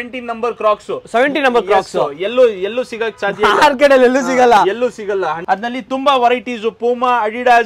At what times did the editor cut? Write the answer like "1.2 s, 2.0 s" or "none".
5.4 s